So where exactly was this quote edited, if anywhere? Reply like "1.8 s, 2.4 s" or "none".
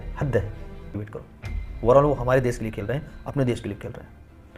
1.0 s